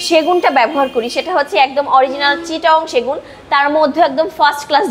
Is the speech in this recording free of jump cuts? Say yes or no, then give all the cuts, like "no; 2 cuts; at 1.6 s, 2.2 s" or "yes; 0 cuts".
yes; 0 cuts